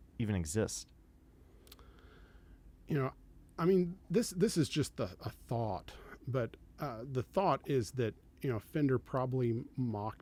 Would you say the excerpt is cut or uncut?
uncut